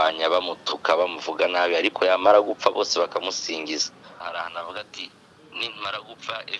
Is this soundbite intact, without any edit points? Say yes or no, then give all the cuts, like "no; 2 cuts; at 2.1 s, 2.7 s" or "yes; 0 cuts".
no; 1 cut; at 4.2 s